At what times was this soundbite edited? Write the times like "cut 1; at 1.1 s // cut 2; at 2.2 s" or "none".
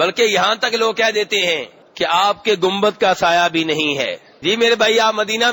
cut 1; at 1.8 s // cut 2; at 4.3 s